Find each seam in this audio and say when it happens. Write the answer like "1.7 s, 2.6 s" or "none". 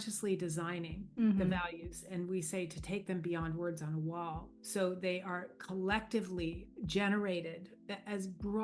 1.0 s, 4.5 s, 6.6 s